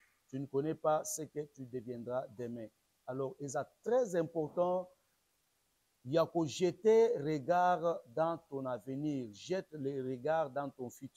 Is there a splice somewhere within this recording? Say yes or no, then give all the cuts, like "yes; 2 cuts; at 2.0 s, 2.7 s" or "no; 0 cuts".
no; 0 cuts